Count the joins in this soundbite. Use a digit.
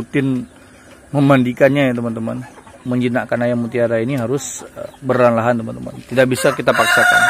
1